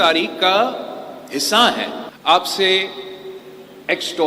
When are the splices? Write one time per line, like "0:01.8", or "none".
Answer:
0:02.1

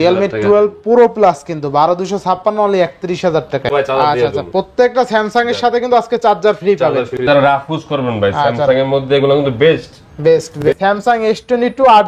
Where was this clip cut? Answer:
0:03.7
0:07.2
0:10.6

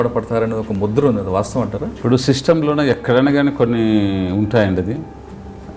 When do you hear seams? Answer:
0:01.9

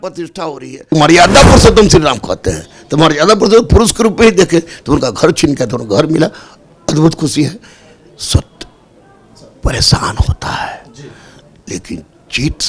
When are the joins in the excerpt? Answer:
0:00.9

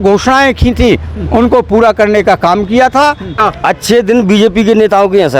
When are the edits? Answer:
0:03.4

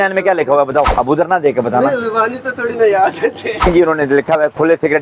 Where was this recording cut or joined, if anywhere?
0:00.9
0:03.6

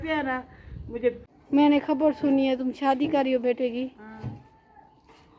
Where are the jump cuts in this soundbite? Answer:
0:01.3

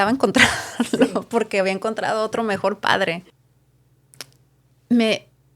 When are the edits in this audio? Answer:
0:03.2

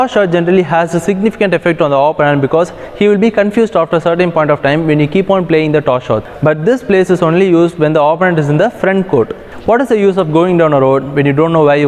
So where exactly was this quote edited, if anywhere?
0:06.3
0:09.5

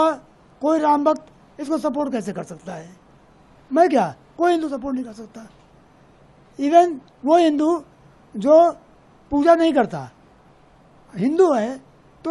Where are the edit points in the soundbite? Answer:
none

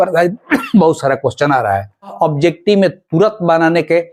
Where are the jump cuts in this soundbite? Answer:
0:02.1

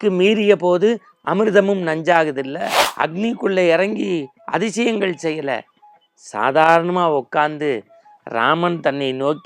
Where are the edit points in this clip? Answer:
0:02.8

